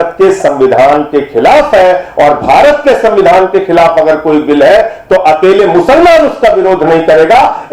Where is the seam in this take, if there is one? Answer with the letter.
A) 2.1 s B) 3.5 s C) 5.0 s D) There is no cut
D